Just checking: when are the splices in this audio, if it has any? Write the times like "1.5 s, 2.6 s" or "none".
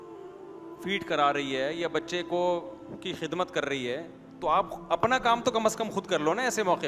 none

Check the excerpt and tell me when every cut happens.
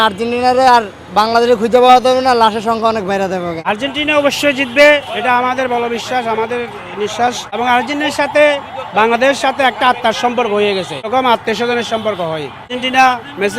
3.6 s, 7.6 s, 11.1 s, 12.7 s

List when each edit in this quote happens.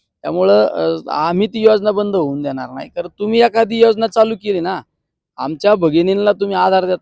none

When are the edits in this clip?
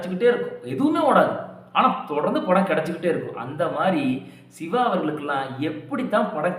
none

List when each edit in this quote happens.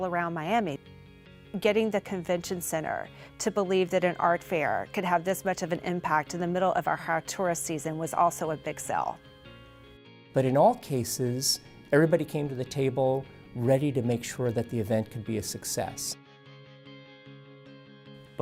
none

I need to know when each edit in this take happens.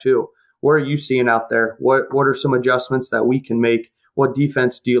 none

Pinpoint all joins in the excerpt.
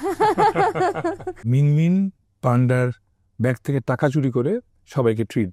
1.4 s

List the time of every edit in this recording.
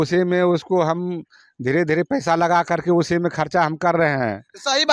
none

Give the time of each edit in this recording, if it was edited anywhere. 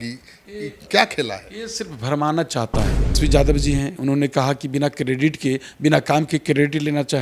3.2 s

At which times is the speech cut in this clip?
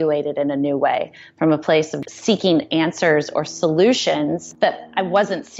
1.9 s, 4.5 s

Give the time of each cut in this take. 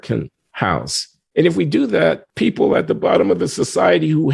2.3 s

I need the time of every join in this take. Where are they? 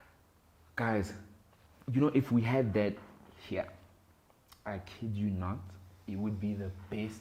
none

